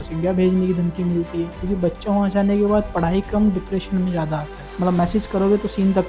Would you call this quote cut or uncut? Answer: cut